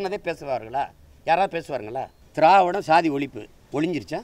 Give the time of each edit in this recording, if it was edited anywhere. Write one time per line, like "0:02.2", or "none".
0:02.2